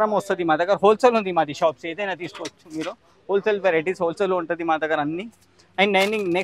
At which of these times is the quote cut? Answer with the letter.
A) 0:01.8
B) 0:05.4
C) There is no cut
C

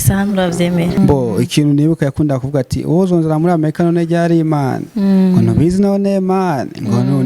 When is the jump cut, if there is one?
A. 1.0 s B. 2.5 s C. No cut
A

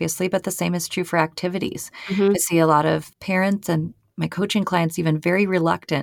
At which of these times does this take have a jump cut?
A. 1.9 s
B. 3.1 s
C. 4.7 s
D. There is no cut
B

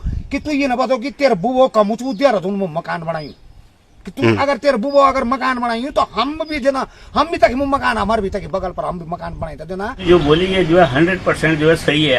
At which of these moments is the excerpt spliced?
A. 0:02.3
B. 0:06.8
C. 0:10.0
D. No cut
C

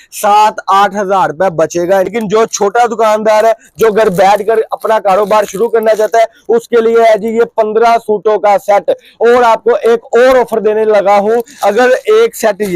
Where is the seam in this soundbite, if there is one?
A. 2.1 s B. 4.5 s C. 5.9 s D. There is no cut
A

